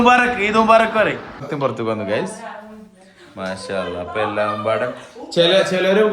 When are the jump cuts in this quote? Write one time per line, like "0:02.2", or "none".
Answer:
0:01.5